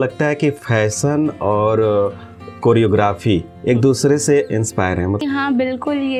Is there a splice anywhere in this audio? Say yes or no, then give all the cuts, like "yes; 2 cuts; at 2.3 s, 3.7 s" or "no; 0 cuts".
no; 0 cuts